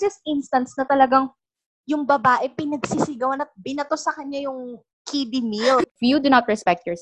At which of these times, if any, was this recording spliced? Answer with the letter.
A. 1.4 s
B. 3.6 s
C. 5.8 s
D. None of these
C